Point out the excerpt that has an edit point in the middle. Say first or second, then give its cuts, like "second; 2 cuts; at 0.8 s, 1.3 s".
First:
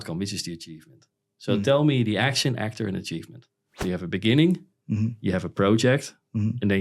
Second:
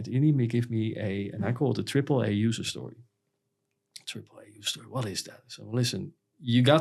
first; 1 cut; at 3.8 s